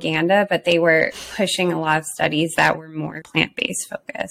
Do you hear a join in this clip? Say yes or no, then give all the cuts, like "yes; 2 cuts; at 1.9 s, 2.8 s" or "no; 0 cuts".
yes; 1 cut; at 3.3 s